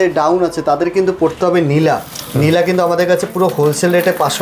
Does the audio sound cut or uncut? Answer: uncut